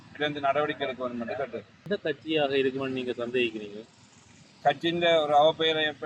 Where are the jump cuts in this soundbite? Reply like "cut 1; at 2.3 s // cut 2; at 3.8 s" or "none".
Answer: cut 1; at 1.8 s